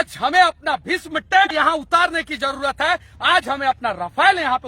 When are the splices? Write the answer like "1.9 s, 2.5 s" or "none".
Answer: 1.5 s